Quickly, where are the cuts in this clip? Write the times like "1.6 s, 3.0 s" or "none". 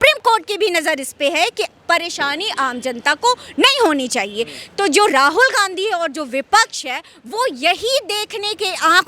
none